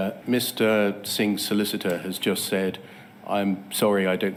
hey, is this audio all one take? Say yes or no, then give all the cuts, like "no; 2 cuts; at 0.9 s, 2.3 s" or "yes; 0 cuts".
yes; 0 cuts